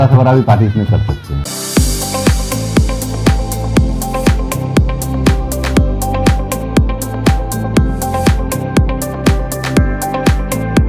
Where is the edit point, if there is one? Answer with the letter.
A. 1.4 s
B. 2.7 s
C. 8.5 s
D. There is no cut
A